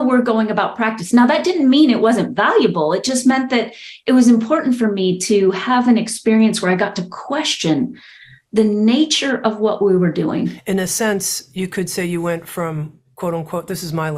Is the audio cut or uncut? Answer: cut